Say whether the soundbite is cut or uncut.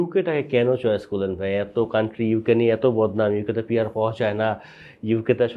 uncut